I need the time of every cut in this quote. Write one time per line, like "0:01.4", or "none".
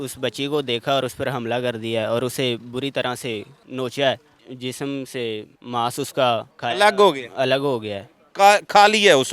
0:03.6
0:04.5
0:05.5
0:06.5

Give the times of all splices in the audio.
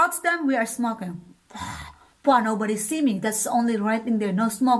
none

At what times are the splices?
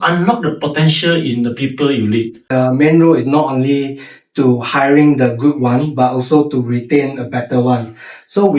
0:02.5

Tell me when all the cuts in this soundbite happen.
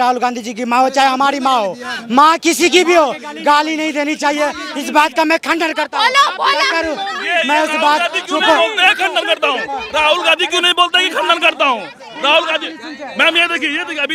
none

